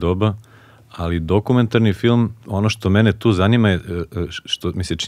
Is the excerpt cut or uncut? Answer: cut